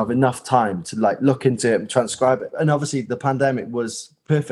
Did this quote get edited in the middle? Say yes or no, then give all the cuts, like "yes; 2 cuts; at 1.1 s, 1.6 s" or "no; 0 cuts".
yes; 1 cut; at 2.5 s